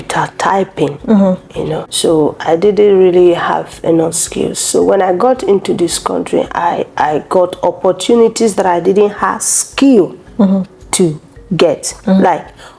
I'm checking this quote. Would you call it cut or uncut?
cut